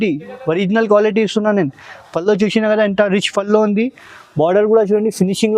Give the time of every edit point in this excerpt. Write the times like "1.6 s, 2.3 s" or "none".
none